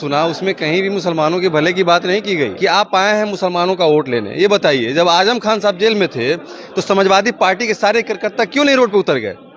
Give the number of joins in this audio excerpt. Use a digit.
1